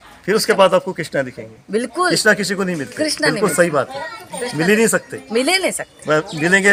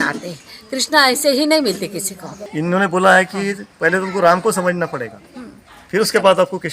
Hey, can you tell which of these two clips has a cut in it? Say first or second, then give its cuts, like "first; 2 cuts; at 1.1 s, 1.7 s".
second; 1 cut; at 2.4 s